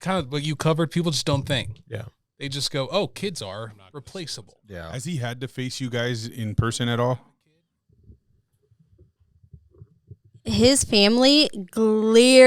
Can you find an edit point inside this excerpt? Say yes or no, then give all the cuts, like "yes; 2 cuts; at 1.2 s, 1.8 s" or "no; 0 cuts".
yes; 1 cut; at 4.9 s